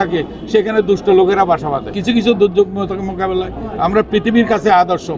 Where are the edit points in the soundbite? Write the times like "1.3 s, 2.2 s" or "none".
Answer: 2.0 s